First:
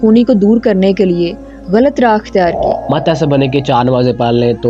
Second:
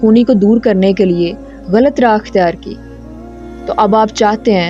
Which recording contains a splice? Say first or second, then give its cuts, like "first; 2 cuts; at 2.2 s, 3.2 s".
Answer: first; 1 cut; at 2.9 s